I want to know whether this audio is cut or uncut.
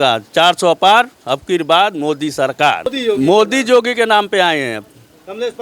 cut